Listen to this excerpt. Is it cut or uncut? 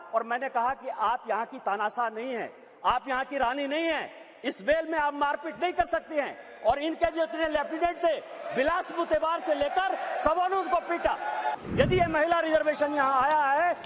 cut